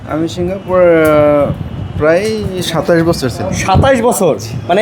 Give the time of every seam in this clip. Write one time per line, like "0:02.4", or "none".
none